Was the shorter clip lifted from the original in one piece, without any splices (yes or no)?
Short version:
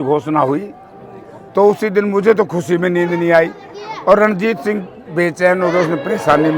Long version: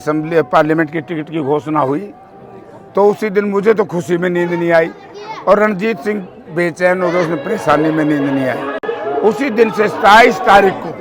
yes